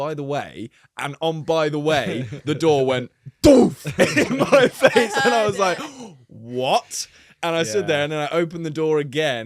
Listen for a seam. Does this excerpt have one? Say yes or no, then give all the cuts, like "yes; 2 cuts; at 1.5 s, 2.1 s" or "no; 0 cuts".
no; 0 cuts